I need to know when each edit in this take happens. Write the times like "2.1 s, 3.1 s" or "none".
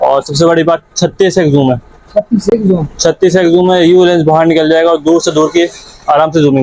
none